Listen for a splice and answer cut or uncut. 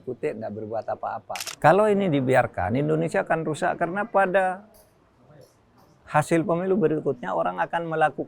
cut